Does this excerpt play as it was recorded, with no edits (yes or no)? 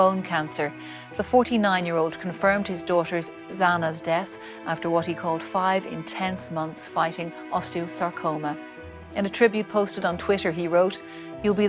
yes